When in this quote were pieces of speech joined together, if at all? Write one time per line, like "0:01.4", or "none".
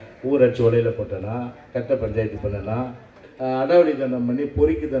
0:03.2